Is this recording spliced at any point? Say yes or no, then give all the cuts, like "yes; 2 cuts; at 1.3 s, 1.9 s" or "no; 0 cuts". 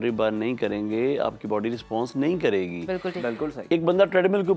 no; 0 cuts